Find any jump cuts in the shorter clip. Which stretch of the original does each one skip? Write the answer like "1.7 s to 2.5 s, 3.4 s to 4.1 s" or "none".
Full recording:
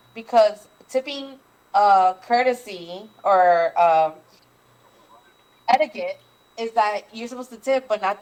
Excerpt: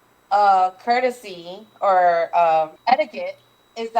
4.2 s to 5.6 s